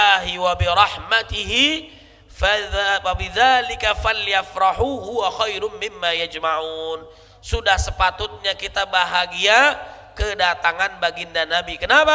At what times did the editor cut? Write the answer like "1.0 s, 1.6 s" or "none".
none